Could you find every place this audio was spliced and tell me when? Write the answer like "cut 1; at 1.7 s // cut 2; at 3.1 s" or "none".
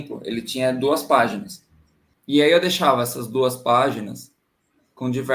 cut 1; at 1.9 s